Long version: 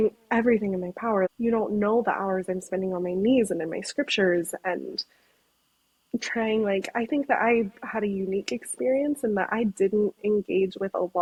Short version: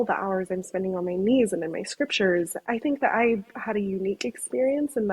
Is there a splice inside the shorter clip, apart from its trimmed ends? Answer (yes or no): yes